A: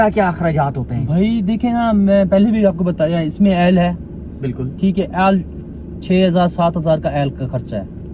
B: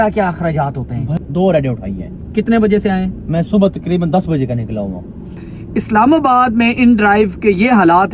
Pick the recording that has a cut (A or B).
B